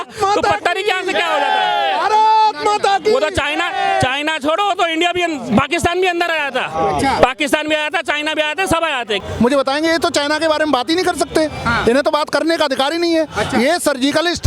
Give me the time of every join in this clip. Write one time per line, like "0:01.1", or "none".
0:09.2